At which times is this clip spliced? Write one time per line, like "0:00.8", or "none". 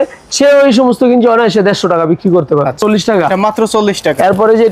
0:02.8

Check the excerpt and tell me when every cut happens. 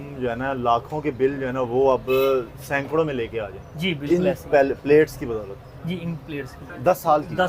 0:06.6

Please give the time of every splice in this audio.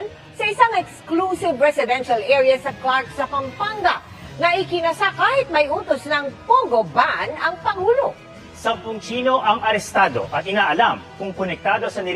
0:04.1
0:05.7

